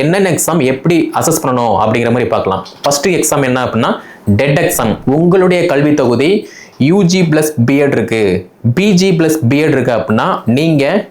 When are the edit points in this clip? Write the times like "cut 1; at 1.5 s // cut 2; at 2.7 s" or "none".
cut 1; at 5.0 s